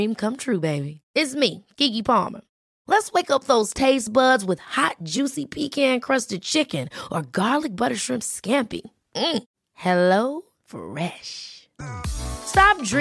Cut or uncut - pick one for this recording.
uncut